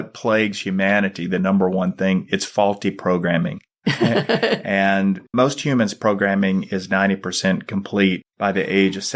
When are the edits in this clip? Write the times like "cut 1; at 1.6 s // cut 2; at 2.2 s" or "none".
cut 1; at 3.6 s // cut 2; at 5.3 s